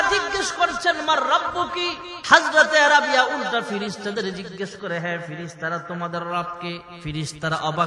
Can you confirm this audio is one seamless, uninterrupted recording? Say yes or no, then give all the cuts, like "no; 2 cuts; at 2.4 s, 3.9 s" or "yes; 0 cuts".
no; 2 cuts; at 2.1 s, 6.9 s